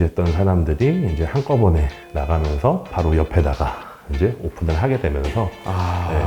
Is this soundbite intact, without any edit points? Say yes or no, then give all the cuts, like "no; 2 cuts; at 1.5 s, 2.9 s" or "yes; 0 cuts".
no; 1 cut; at 2.9 s